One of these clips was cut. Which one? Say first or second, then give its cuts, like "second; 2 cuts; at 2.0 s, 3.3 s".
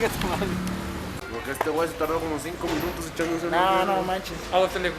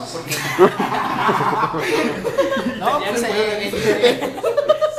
first; 1 cut; at 1.2 s